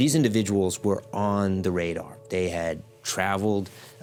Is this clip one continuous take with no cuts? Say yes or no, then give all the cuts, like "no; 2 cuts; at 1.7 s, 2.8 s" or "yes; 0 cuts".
yes; 0 cuts